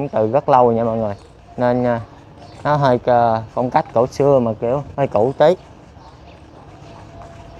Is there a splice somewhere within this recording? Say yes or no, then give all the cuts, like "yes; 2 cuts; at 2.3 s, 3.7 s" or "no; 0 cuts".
no; 0 cuts